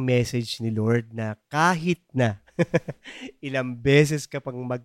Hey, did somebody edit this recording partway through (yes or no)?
no